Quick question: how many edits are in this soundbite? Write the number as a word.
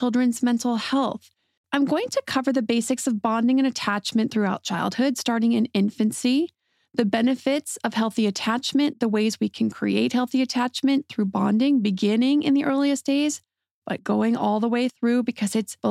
one